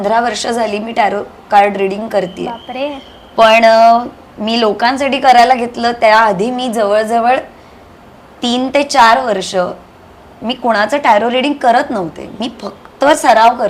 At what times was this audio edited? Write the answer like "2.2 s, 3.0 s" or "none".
none